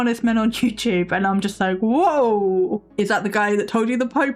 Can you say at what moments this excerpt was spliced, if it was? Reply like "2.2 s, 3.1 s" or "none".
2.9 s